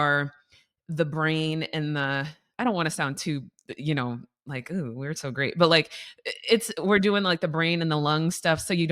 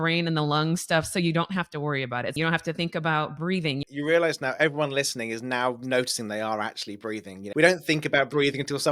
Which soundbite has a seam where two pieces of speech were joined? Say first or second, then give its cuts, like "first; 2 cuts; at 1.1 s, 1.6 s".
second; 3 cuts; at 2.4 s, 3.8 s, 7.6 s